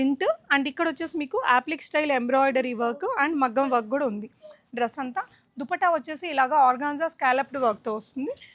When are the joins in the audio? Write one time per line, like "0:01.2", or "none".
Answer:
none